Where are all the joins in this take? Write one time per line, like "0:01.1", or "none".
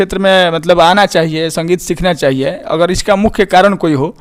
none